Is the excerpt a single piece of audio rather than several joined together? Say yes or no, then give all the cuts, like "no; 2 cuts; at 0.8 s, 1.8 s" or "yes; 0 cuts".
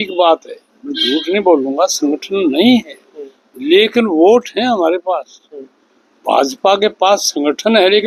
yes; 0 cuts